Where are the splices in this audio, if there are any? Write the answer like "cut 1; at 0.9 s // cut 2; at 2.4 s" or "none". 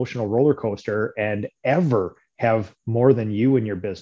none